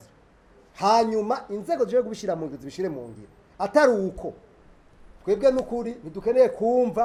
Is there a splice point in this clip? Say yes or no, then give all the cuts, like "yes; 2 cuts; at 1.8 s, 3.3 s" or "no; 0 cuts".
no; 0 cuts